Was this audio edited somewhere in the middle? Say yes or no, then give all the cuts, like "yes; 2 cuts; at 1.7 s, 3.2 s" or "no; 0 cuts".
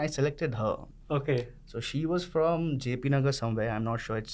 no; 0 cuts